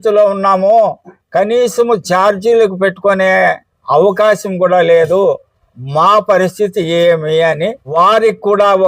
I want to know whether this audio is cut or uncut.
cut